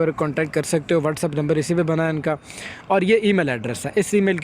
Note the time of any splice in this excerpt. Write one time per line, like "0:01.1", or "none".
none